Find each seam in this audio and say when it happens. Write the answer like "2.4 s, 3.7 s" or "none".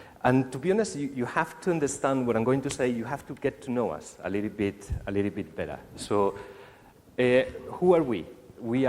7.6 s